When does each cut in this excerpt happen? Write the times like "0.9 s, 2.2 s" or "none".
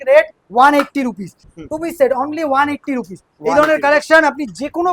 1.5 s